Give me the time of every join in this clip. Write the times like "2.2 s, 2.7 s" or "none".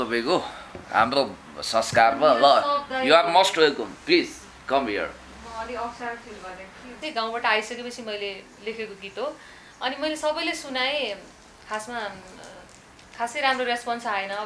7.0 s